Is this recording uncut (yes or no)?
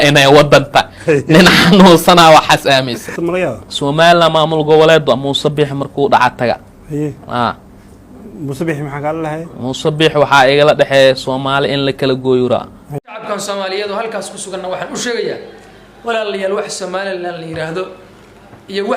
no